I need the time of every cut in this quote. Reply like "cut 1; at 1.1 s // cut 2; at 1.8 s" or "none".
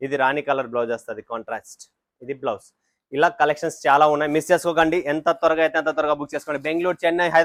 none